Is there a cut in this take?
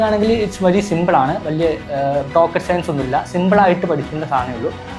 no; 0 cuts

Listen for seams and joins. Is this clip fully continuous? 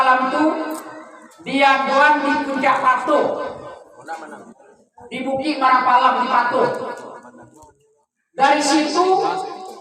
yes; 0 cuts

